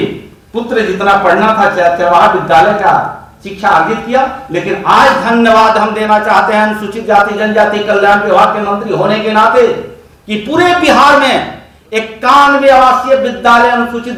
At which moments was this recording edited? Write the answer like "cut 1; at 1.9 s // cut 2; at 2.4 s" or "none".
none